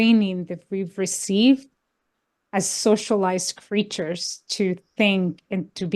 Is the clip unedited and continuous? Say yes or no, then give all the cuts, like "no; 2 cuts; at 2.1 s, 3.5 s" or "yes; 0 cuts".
yes; 0 cuts